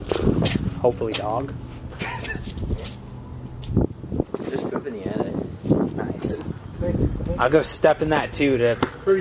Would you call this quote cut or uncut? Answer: uncut